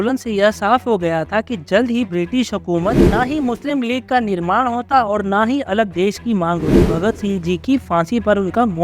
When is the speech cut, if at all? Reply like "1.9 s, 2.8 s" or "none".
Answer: 3.1 s, 6.8 s